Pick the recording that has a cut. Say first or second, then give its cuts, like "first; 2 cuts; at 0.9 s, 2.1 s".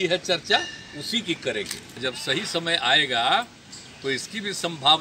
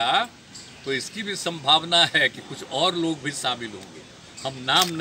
first; 1 cut; at 1.8 s